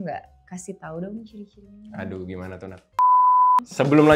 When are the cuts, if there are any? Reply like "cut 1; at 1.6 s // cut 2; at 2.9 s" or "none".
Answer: none